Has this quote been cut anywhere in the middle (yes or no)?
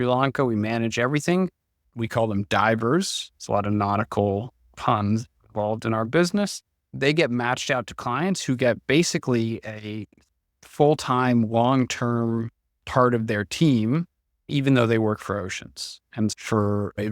yes